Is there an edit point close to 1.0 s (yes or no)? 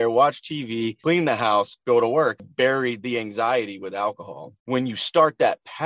yes